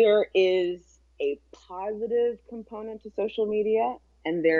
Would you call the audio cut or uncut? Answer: uncut